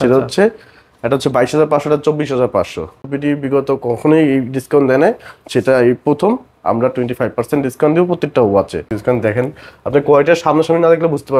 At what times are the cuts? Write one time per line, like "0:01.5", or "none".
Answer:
0:03.0
0:08.9